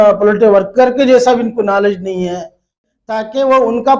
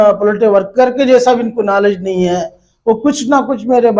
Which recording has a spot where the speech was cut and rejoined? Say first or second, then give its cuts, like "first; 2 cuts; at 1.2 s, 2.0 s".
first; 1 cut; at 2.7 s